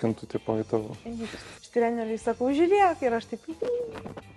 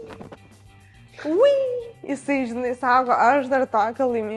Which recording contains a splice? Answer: first; 1 cut; at 1.7 s

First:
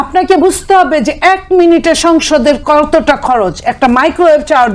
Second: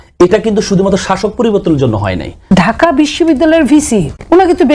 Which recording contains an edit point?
second; 1 cut; at 2.4 s

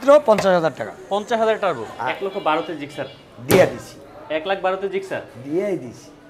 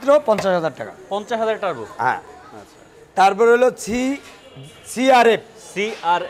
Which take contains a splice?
first; 1 cut; at 1.9 s

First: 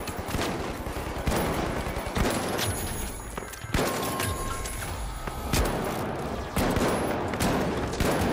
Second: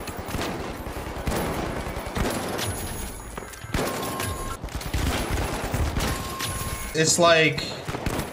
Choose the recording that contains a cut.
second; 2 cuts; at 4.6 s, 6.9 s

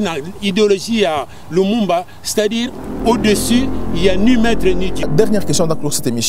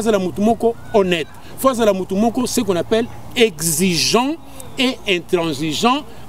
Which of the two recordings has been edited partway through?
first; 1 cut; at 5.0 s

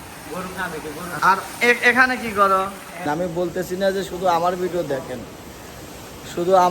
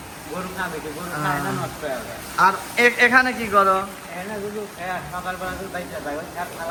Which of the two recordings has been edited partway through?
first; 2 cuts; at 1.2 s, 3.1 s

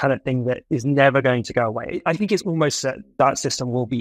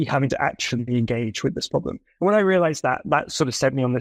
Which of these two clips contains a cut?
first; 2 cuts; at 2.0 s, 3.1 s

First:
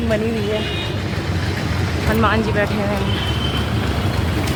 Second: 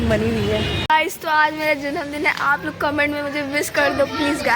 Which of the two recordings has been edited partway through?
second; 1 cut; at 1.0 s

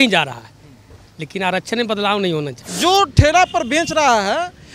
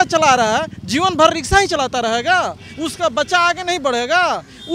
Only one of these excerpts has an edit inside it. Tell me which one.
first; 1 cut; at 2.6 s

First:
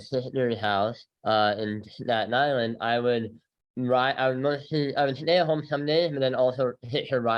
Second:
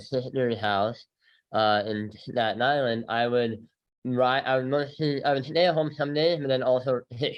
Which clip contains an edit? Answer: first; 1 cut; at 1.1 s

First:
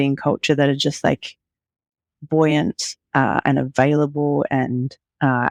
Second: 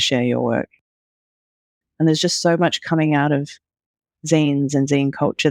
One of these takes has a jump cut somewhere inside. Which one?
second; 1 cut; at 1.3 s

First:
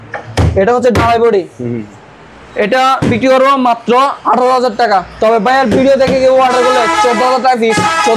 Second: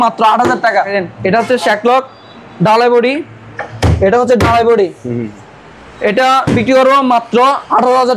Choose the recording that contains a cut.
second; 1 cut; at 1.0 s

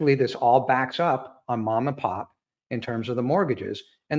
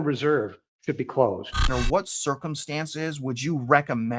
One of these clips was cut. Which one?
second; 1 cut; at 1.7 s

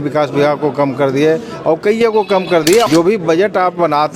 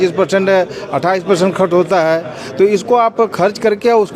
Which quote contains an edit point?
first; 1 cut; at 2.9 s

